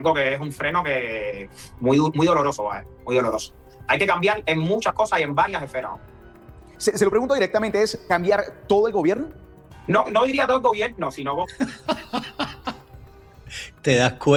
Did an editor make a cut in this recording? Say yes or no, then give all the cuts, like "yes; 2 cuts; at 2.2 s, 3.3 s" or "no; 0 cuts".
no; 0 cuts